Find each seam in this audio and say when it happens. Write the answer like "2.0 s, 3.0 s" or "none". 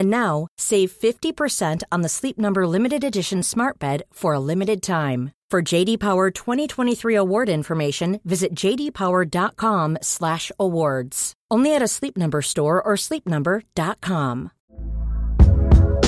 14.6 s